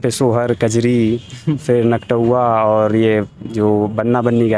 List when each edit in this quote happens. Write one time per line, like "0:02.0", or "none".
none